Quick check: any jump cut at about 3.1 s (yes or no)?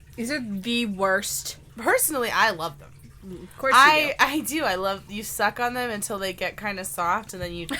no